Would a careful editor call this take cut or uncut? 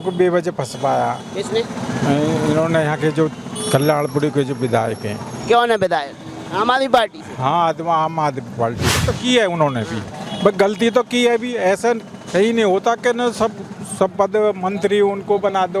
cut